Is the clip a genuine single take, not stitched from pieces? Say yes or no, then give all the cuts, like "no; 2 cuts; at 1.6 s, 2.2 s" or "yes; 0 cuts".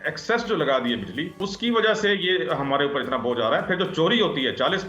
no; 1 cut; at 1.4 s